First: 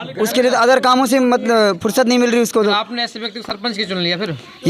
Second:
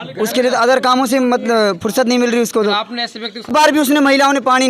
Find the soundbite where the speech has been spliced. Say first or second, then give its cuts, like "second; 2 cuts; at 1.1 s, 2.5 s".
second; 1 cut; at 3.5 s